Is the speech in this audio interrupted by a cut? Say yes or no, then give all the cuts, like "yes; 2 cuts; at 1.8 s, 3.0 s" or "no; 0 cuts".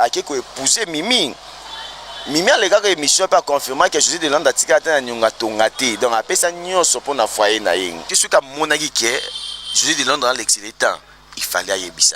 yes; 1 cut; at 8.1 s